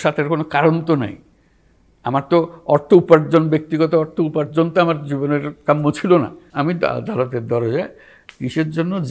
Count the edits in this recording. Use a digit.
1